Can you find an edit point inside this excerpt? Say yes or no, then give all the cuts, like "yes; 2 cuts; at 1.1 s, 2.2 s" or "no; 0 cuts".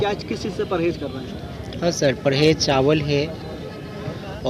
no; 0 cuts